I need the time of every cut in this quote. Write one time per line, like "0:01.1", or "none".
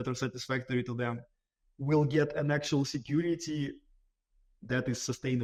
none